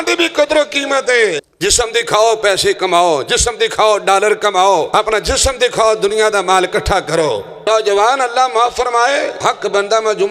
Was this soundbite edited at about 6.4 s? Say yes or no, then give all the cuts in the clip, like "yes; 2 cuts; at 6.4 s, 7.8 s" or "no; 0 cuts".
no; 4 cuts; at 1.5 s, 4.9 s, 7.6 s, 9.4 s